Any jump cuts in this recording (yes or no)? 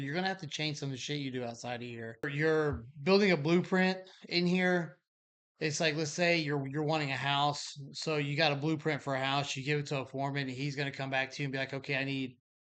yes